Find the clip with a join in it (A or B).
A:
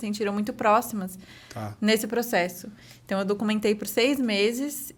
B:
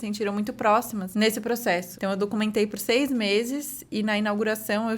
B